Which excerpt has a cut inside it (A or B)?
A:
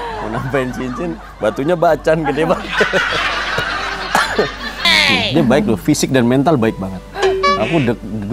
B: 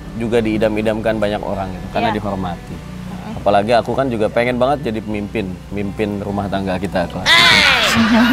A